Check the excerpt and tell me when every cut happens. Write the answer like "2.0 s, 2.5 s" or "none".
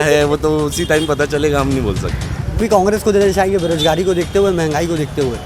2.6 s